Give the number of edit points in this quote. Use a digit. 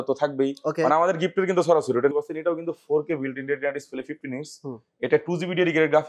1